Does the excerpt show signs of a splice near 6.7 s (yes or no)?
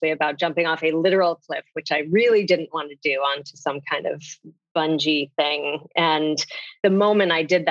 yes